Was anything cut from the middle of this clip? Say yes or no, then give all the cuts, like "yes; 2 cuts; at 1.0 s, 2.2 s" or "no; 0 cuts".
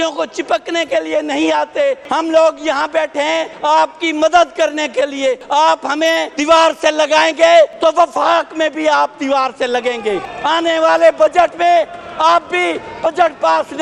yes; 6 cuts; at 2.0 s, 3.5 s, 5.4 s, 6.3 s, 7.7 s, 10.3 s